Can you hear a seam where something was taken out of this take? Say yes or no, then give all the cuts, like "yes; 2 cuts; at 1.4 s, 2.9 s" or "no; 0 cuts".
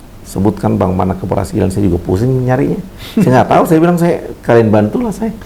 no; 0 cuts